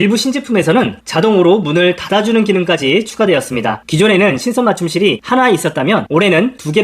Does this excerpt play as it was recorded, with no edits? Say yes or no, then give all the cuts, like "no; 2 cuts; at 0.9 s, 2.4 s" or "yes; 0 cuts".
no; 1 cut; at 3.8 s